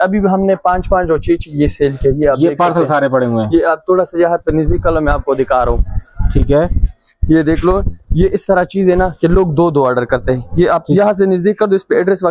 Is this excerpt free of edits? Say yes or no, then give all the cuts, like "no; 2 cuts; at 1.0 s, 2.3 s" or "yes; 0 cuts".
yes; 0 cuts